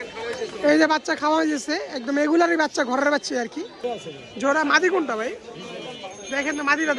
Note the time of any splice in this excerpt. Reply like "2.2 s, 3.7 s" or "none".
3.8 s